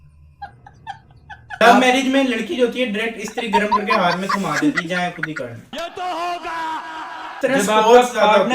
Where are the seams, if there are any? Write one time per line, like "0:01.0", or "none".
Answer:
0:01.4
0:07.4